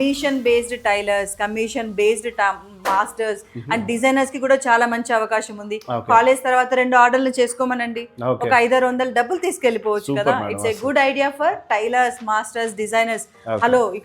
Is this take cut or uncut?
uncut